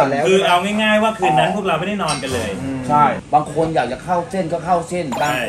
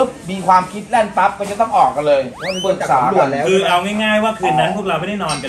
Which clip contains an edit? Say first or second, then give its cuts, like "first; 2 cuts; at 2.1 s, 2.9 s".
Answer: first; 1 cut; at 3.2 s